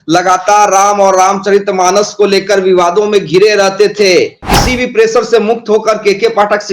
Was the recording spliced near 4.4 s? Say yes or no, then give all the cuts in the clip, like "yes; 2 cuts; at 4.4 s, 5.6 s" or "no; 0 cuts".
yes; 1 cut; at 4.4 s